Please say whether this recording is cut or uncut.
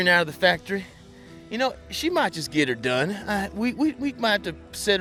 uncut